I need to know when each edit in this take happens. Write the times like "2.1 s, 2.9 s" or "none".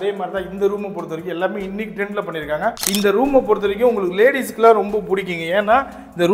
2.8 s